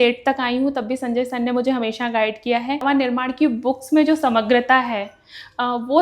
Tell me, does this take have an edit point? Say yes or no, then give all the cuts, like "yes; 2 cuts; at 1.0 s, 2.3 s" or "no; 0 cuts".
yes; 1 cut; at 2.8 s